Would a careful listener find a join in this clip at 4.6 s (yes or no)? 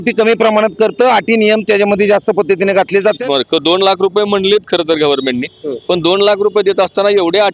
no